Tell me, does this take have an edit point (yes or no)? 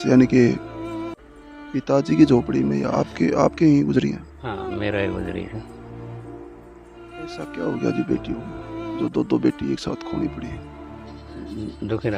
yes